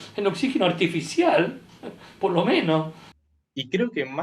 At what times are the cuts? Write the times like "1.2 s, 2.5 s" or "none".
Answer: 3.1 s